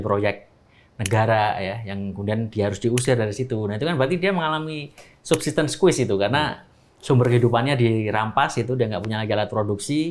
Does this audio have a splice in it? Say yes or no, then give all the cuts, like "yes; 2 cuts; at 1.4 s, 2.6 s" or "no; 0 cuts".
no; 0 cuts